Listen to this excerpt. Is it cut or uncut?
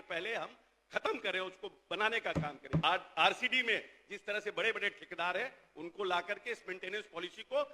cut